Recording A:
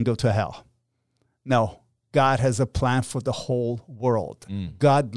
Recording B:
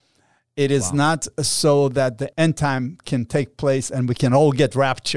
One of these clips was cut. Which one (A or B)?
B